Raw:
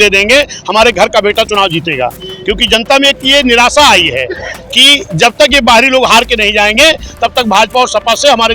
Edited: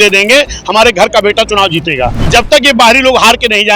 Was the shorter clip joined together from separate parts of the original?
yes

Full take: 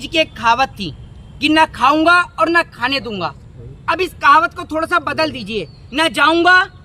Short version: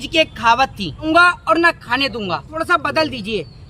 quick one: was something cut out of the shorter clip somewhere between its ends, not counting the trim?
yes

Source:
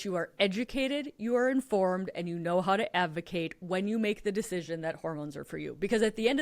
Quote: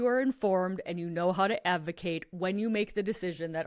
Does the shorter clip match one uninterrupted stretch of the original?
yes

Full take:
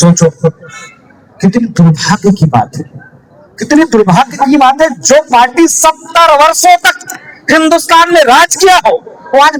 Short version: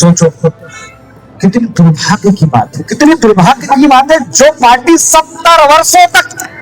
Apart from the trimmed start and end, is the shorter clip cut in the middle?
yes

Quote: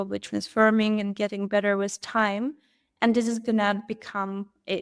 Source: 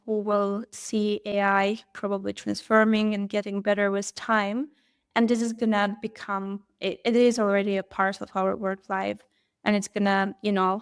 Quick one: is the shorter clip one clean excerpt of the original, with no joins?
yes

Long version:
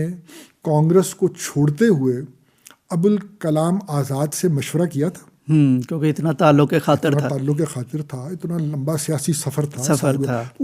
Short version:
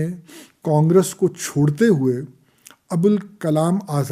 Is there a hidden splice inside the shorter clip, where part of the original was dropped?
no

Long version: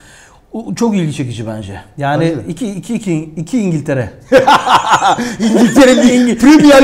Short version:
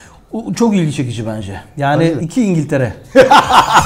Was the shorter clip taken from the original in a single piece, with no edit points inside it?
no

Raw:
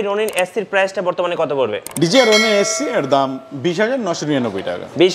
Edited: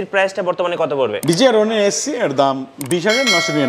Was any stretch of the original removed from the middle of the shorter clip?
yes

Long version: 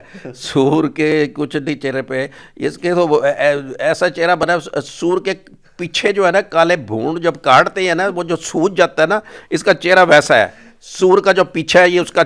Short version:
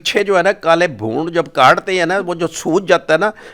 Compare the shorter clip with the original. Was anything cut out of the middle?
no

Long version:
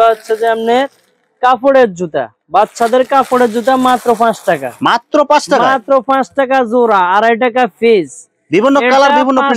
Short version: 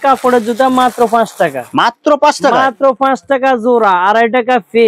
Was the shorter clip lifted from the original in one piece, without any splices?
yes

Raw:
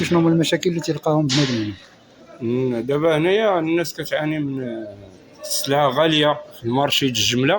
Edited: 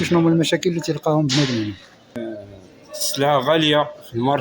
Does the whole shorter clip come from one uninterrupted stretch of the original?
no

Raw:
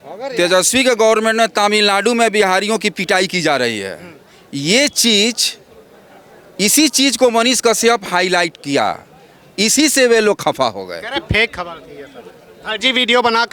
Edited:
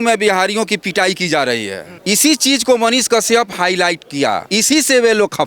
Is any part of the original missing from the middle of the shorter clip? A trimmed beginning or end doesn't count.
yes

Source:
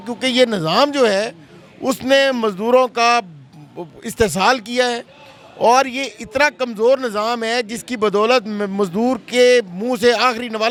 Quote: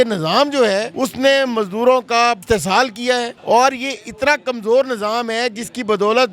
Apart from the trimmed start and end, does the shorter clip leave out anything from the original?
yes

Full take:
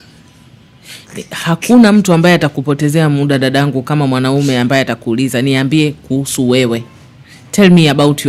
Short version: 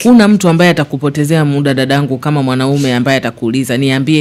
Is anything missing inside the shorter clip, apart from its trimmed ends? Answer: no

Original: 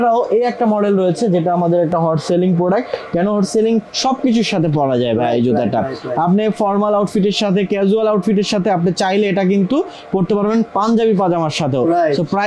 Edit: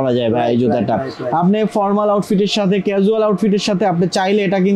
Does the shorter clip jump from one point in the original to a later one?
no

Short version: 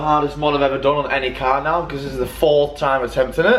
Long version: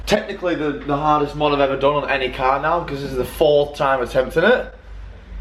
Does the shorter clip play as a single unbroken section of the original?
yes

